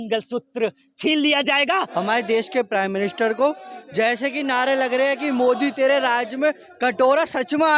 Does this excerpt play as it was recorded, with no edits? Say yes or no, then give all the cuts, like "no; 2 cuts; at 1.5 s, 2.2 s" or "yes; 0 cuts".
no; 1 cut; at 1.9 s